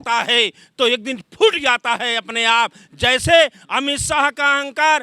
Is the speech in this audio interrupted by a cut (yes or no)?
no